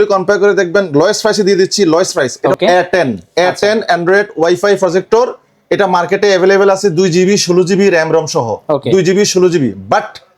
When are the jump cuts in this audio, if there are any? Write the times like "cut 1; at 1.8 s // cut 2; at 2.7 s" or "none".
cut 1; at 2.4 s

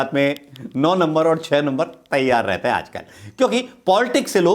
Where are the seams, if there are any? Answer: none

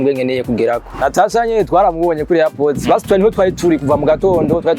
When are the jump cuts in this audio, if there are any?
cut 1; at 1.0 s

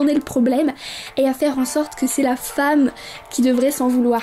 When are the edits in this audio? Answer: none

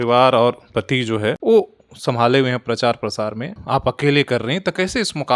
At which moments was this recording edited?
cut 1; at 1.4 s // cut 2; at 3.5 s

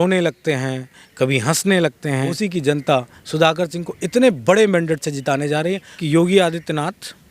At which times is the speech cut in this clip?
cut 1; at 2.3 s // cut 2; at 5.9 s

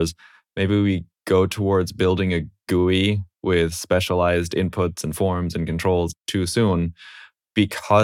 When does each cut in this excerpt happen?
cut 1; at 1.1 s // cut 2; at 6.2 s

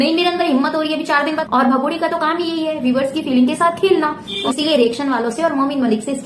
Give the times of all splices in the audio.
cut 1; at 1.4 s // cut 2; at 4.3 s

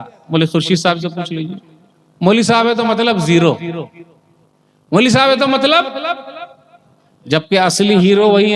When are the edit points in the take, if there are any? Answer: none

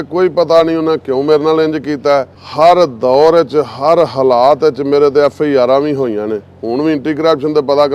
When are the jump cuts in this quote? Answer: cut 1; at 2.4 s

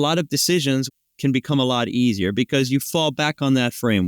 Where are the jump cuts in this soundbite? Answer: cut 1; at 0.9 s

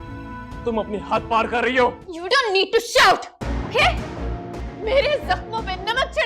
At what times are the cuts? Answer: cut 1; at 2.1 s // cut 2; at 4.6 s

